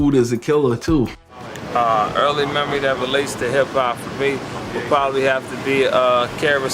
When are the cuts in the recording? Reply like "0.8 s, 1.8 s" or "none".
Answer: 1.2 s